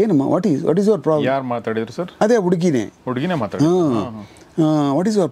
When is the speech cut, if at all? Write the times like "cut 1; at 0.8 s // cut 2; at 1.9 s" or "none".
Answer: none